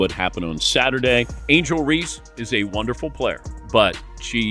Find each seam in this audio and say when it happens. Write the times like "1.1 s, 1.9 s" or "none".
1.4 s, 3.5 s